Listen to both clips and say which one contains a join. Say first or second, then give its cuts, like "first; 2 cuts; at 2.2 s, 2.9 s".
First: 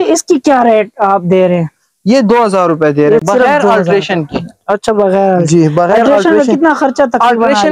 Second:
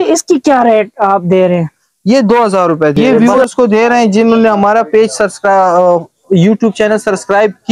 second; 1 cut; at 3.0 s